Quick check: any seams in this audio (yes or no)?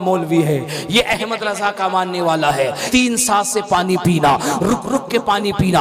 yes